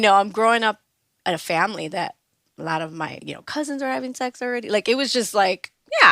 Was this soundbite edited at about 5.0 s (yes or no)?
no